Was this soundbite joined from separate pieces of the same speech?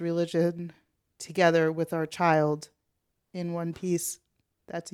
no; 0 cuts

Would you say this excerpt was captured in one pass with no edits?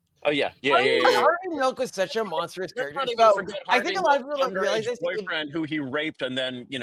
yes; 0 cuts

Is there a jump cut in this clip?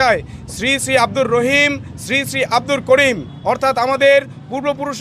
no; 0 cuts

